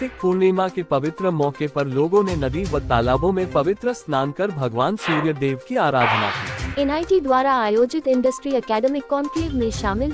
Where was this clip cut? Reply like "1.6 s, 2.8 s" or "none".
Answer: 6.7 s